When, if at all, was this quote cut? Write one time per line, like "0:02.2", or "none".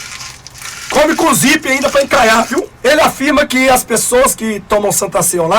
0:02.7